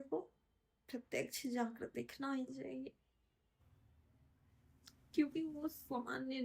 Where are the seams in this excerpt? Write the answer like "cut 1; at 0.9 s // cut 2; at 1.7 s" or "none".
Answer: cut 1; at 3.4 s